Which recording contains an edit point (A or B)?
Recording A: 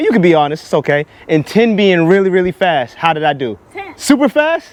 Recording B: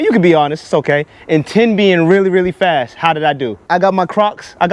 B